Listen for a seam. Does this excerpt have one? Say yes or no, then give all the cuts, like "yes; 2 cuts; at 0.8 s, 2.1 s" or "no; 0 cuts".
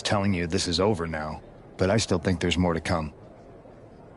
yes; 1 cut; at 3.2 s